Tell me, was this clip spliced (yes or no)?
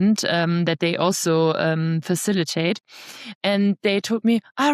no